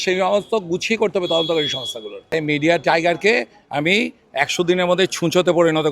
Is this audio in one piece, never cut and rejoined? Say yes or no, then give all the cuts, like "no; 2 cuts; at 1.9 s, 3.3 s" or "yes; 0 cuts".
no; 1 cut; at 2.2 s